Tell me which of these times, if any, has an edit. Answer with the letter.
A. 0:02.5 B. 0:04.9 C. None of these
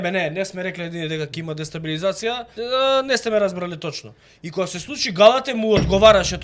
A